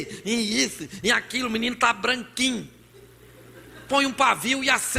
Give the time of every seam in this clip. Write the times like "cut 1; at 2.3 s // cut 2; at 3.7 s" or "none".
none